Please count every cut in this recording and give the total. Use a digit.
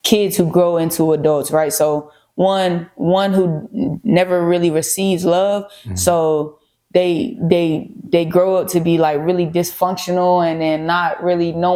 0